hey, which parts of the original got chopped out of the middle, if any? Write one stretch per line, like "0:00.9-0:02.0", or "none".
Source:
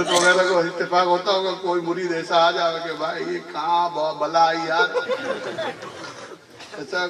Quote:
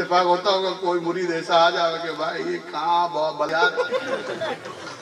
0:04.3-0:04.7